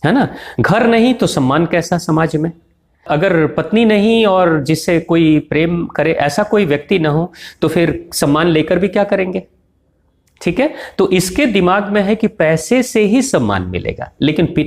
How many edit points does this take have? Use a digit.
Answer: 1